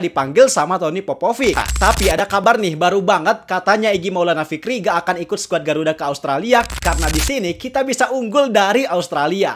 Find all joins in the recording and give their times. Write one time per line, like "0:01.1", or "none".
0:01.7
0:06.7